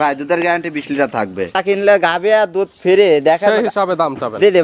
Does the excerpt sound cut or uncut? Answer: cut